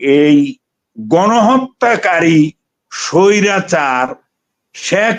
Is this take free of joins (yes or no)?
yes